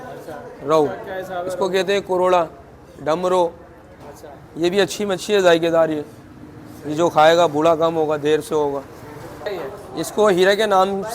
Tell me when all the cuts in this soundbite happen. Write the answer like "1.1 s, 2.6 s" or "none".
9.5 s